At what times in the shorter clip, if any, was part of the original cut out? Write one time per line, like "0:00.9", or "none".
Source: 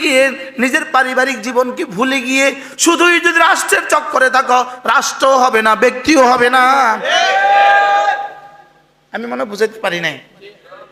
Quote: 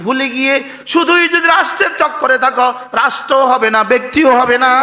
none